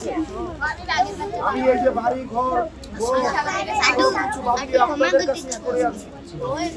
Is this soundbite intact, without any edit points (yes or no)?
yes